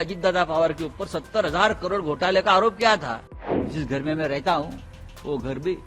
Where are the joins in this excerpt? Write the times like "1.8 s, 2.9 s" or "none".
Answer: 3.6 s